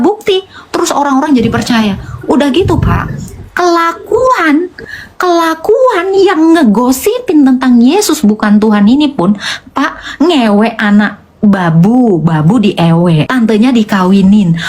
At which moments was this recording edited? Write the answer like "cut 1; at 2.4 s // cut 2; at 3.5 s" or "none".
cut 1; at 13.3 s